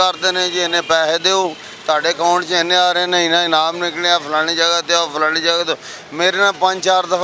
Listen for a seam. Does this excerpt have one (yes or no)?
no